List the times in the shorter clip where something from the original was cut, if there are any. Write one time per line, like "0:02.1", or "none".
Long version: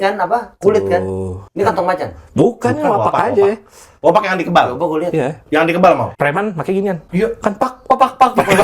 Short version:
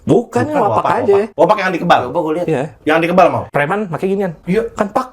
0:01.3

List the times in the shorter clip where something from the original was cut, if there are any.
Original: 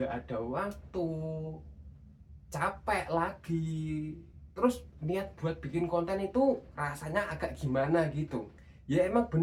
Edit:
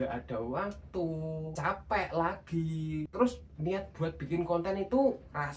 0:01.5
0:03.1

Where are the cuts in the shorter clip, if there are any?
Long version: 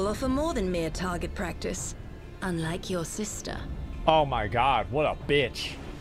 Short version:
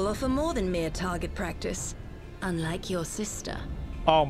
none

